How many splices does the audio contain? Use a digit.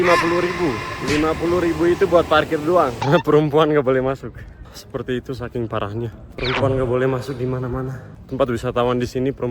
1